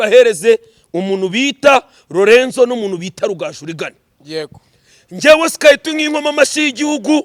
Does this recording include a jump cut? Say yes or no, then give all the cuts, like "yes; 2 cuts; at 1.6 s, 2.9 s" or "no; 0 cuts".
no; 0 cuts